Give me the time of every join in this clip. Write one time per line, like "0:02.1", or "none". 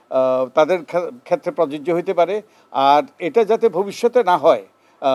none